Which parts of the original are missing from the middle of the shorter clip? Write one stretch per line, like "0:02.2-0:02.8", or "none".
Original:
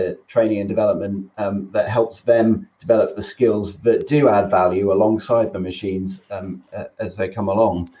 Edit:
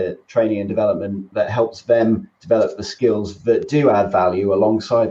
0:01.3-0:01.6